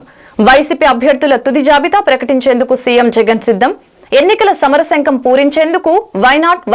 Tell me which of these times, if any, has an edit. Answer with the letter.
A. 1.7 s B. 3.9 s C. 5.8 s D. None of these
D